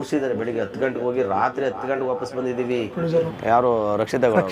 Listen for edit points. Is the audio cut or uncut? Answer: cut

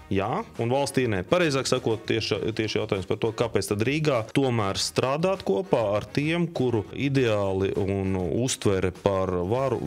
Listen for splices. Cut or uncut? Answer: uncut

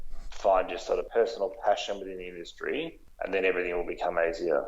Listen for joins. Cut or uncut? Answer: cut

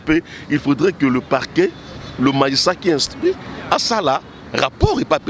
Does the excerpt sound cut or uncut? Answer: uncut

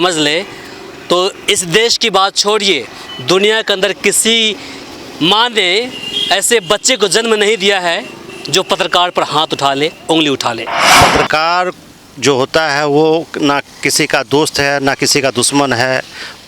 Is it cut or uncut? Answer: cut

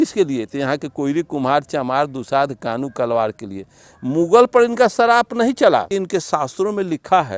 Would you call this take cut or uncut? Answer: cut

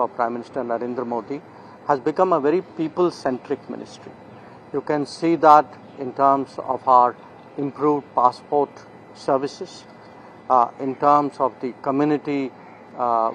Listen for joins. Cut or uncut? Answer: uncut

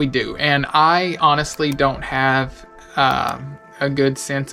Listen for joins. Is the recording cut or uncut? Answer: uncut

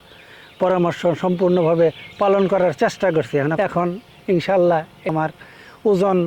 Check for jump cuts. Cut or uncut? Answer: cut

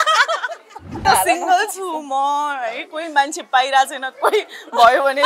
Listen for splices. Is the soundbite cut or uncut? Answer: cut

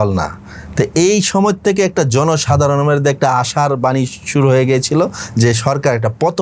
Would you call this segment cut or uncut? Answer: uncut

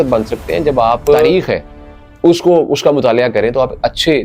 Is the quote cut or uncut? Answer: cut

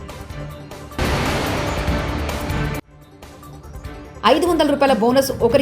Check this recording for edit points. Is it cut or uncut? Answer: cut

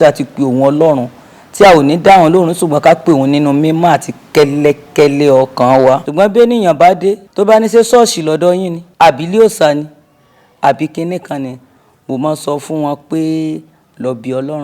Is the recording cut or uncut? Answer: cut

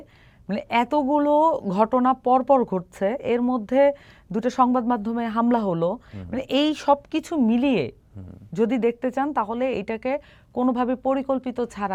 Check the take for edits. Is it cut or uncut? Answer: uncut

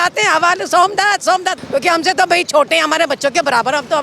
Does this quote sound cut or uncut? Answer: cut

